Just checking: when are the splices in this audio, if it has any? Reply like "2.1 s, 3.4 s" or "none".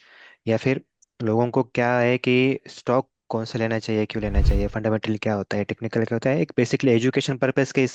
none